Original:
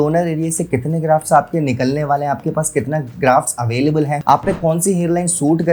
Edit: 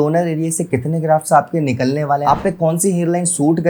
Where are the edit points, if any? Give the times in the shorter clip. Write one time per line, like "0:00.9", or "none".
0:02.2